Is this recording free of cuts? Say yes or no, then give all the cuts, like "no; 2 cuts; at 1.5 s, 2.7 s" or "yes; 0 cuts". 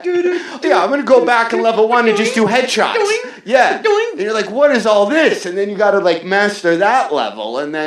yes; 0 cuts